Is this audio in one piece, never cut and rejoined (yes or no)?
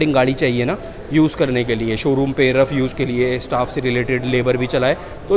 yes